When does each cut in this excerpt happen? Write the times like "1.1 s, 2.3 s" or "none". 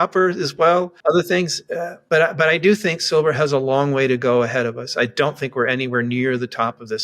0.9 s, 1.9 s